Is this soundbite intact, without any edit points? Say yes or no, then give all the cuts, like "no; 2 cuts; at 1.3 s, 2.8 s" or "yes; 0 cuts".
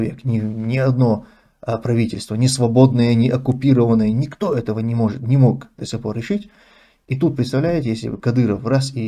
yes; 0 cuts